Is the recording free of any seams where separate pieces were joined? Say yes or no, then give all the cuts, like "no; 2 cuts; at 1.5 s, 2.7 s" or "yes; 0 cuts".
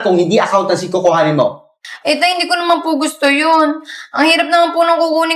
yes; 0 cuts